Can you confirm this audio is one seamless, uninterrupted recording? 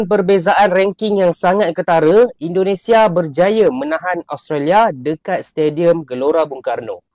yes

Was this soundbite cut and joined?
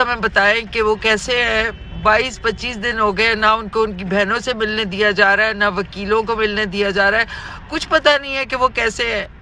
no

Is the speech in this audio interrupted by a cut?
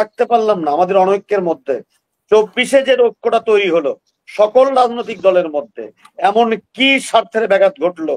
no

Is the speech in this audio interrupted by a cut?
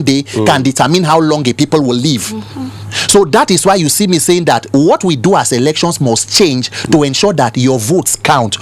no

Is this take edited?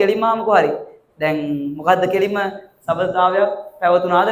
no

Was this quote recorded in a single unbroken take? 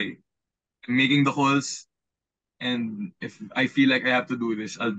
yes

